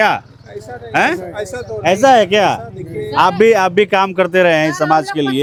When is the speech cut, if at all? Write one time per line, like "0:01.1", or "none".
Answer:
none